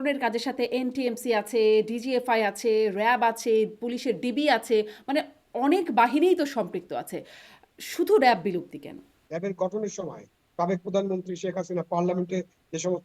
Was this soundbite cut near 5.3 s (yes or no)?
no